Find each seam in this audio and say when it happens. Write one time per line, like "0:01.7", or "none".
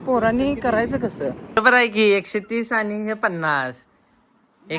0:01.6